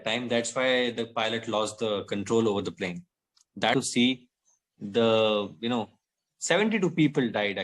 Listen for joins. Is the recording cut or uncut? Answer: cut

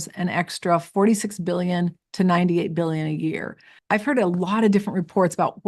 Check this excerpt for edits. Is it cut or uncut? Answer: cut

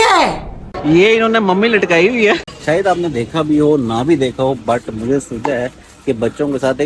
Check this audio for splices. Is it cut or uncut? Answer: cut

